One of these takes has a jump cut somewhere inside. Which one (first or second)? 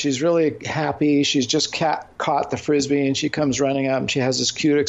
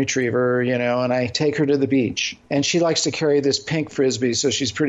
second